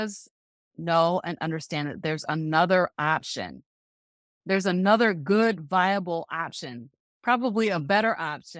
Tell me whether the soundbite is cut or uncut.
uncut